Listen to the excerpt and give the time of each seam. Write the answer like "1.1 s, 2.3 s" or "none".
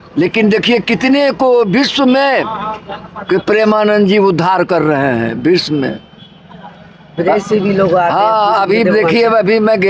none